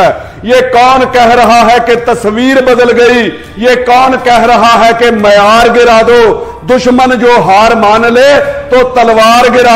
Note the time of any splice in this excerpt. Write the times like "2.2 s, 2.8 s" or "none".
none